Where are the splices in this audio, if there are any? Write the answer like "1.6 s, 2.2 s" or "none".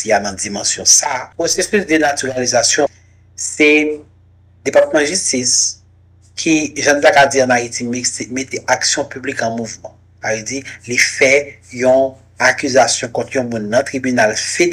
1.3 s, 2.9 s